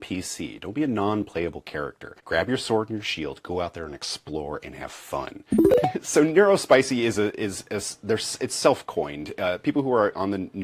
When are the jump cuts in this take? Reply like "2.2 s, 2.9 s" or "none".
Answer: 2.2 s, 5.5 s